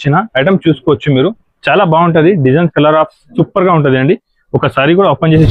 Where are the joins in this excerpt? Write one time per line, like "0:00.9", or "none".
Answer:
none